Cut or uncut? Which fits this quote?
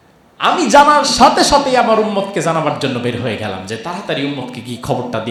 uncut